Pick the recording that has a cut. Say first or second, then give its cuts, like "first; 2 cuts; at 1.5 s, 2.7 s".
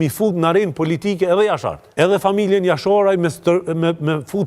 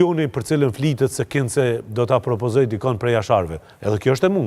first; 1 cut; at 1.8 s